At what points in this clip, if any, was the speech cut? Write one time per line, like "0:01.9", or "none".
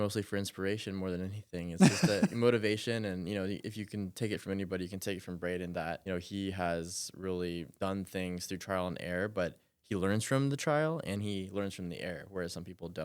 0:06.0
0:07.7